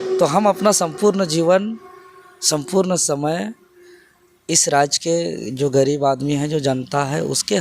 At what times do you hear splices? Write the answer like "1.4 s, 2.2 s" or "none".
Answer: none